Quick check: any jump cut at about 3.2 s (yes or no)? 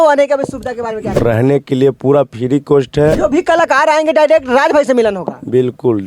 yes